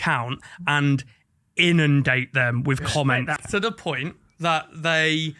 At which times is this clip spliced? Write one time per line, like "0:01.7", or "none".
0:03.4